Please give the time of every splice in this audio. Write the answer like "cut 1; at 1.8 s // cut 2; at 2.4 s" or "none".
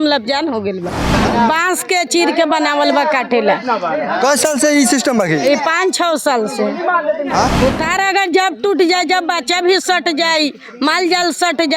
cut 1; at 1.2 s // cut 2; at 7.5 s